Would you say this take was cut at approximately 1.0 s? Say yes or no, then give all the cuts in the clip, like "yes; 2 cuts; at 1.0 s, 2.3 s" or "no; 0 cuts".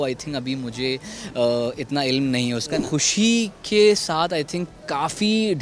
no; 1 cut; at 2.8 s